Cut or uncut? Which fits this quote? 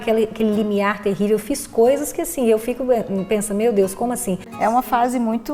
cut